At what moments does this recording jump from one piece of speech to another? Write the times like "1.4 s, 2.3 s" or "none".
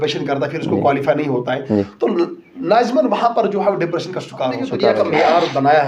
4.9 s